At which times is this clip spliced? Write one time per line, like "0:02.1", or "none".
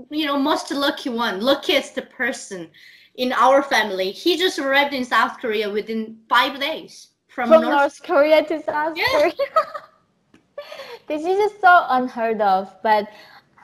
none